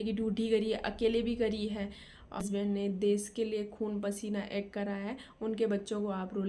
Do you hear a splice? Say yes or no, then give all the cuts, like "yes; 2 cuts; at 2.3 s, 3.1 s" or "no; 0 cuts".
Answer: yes; 1 cut; at 2.4 s